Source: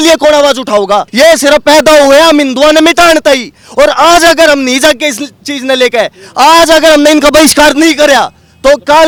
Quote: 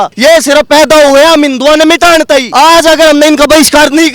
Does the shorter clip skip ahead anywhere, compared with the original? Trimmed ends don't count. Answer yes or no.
yes